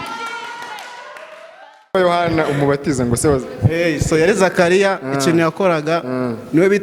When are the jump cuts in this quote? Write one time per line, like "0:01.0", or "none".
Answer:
0:01.9